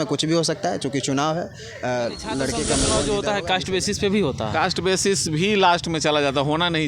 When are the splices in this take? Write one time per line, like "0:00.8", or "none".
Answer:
0:02.9

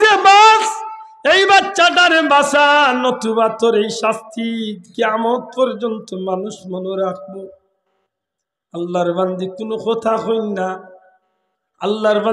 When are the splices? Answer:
none

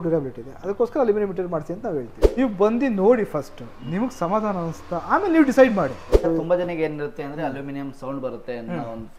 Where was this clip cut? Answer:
0:02.2
0:06.1

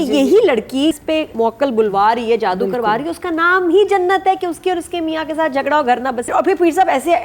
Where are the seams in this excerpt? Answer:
0:01.1
0:06.3

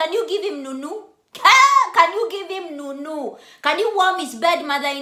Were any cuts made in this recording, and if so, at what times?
none

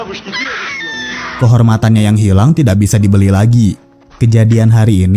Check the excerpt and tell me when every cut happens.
0:01.3

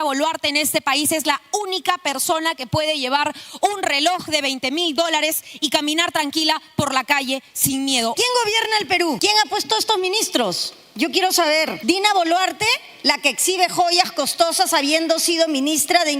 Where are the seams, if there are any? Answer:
0:08.1
0:09.2
0:11.8

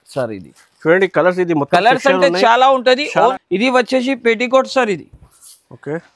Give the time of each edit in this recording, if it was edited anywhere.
0:03.4

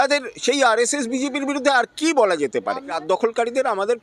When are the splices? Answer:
0:03.0

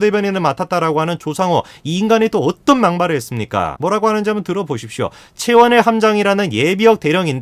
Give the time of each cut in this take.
0:03.7

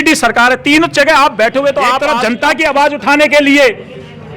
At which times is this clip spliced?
0:02.1

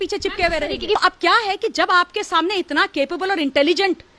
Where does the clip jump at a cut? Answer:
0:01.0

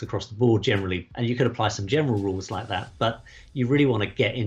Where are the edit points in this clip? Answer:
0:01.0

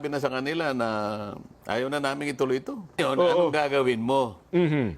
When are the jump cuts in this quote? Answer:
0:03.0

